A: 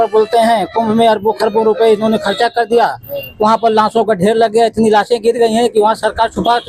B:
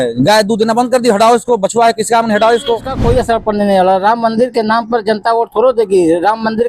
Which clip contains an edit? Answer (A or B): B